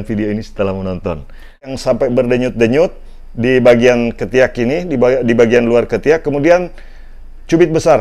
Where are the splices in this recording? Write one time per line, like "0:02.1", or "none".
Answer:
0:01.7